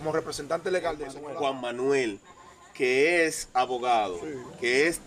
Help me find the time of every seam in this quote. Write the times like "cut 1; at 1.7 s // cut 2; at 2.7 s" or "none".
cut 1; at 1.2 s